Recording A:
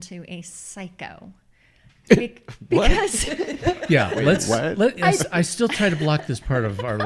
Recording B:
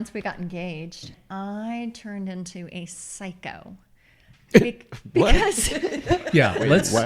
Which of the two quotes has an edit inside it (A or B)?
B